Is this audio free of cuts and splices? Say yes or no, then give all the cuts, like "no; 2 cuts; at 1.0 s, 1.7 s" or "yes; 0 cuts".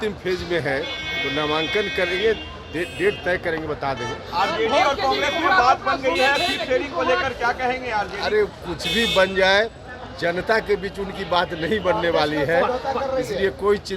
yes; 0 cuts